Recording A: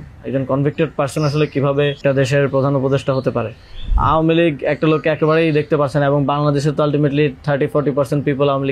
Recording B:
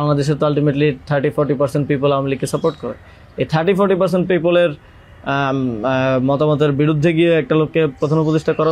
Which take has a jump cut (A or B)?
A